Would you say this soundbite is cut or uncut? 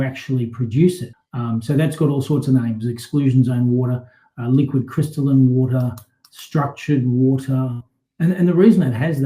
cut